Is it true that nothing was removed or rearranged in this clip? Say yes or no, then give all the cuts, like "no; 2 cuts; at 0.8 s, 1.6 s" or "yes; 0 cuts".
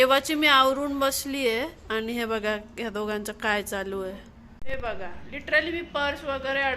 no; 1 cut; at 4.5 s